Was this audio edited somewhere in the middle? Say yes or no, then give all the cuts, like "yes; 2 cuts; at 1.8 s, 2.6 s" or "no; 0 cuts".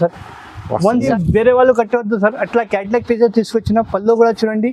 yes; 1 cut; at 1.1 s